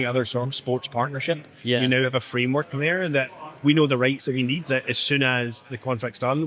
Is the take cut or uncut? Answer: cut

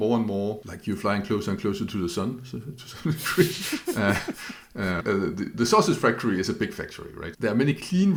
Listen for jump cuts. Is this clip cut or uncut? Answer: uncut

